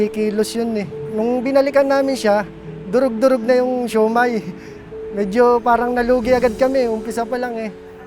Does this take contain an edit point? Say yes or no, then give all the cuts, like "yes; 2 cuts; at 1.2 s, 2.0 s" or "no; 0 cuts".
yes; 1 cut; at 1.0 s